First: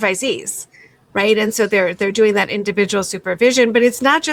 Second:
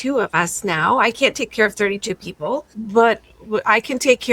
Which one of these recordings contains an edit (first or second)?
second